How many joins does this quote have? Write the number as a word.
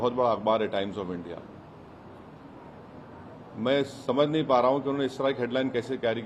zero